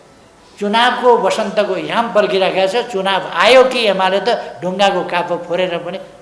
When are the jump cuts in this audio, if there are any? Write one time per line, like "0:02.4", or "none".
none

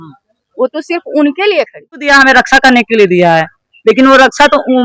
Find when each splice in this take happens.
0:02.1

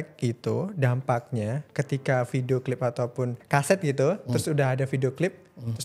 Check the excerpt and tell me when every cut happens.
0:03.4

